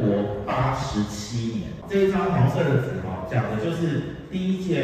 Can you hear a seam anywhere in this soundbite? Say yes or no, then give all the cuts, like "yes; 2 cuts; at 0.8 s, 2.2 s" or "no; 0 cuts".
no; 0 cuts